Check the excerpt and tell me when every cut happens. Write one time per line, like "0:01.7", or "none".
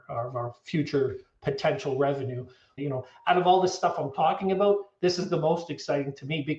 0:02.6